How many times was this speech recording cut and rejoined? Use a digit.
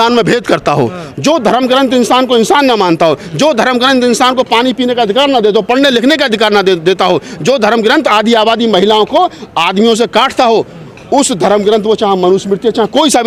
0